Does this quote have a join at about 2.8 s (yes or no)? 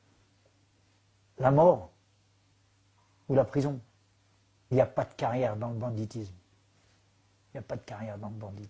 no